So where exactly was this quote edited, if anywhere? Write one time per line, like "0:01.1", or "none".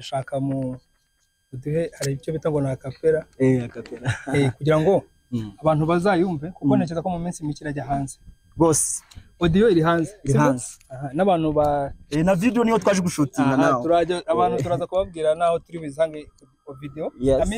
none